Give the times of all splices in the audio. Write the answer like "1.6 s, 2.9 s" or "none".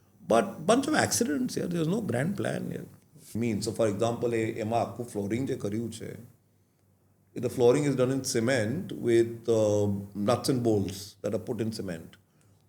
3.3 s